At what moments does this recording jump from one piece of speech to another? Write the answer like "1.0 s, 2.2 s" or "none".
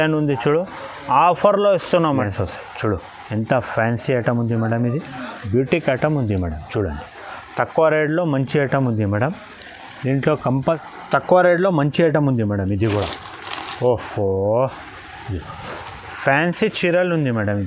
2.2 s, 10.8 s